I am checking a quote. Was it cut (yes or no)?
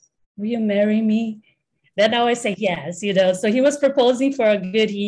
no